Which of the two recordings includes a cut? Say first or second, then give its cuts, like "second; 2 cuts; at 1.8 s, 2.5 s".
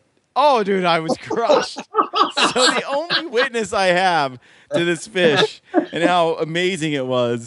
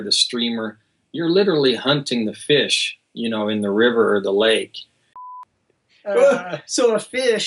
second; 1 cut; at 5.2 s